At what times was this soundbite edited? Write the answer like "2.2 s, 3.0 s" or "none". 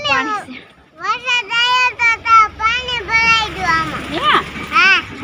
none